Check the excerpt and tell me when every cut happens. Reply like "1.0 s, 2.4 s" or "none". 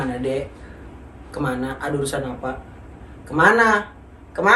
none